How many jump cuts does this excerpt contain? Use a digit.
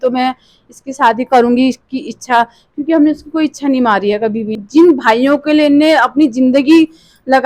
1